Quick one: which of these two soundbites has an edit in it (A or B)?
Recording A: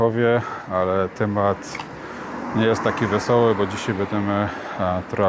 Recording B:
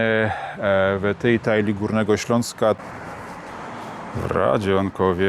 B